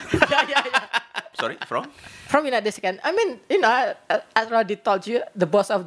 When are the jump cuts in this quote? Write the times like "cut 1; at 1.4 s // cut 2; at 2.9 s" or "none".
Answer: cut 1; at 1.3 s